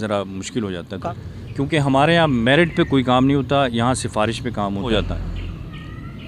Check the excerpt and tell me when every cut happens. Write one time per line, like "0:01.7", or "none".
0:01.0
0:04.8